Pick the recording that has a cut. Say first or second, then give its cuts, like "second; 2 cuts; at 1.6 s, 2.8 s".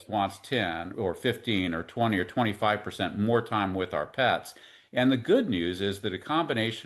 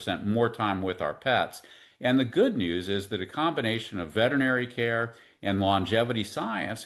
first; 1 cut; at 0.9 s